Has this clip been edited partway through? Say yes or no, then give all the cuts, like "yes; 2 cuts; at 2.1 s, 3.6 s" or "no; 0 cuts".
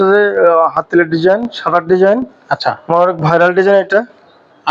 no; 0 cuts